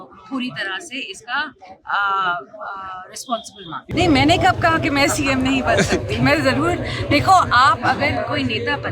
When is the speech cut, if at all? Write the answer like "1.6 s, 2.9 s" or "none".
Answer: 3.8 s